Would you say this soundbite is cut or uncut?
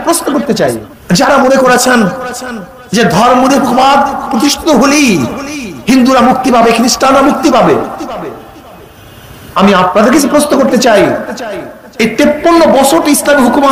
cut